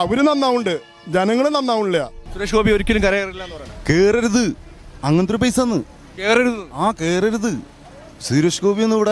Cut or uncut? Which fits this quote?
cut